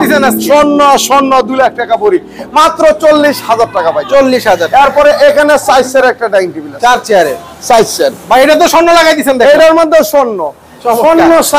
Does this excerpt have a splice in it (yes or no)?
no